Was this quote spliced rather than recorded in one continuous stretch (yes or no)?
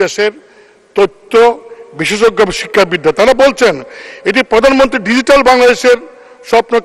no